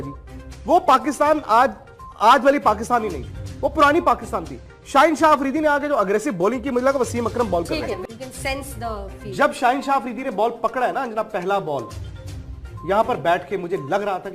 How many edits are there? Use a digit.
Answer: 1